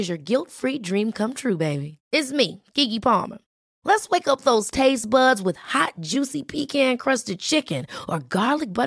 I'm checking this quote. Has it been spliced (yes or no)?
no